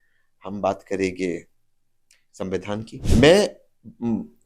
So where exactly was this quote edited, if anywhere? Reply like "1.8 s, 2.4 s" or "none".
2.9 s